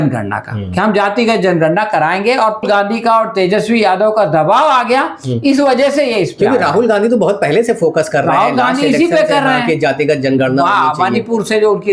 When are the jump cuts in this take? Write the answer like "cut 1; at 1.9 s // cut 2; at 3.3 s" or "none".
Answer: cut 1; at 2.6 s